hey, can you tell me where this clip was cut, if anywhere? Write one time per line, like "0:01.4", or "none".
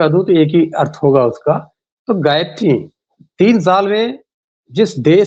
none